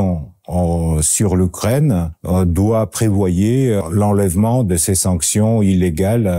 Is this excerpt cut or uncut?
cut